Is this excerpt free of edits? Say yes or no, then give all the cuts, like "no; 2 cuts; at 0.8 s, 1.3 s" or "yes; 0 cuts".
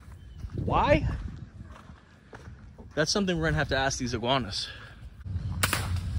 no; 1 cut; at 5.3 s